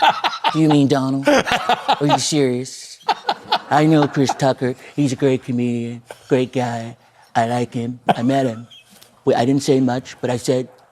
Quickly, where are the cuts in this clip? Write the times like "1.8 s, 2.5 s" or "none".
3.3 s, 7.9 s